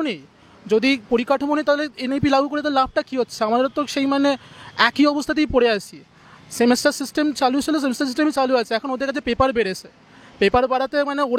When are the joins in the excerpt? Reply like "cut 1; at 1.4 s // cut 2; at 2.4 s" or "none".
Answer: none